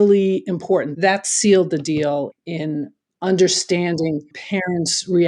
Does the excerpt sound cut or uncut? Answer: cut